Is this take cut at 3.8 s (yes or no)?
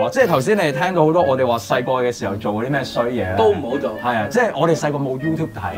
no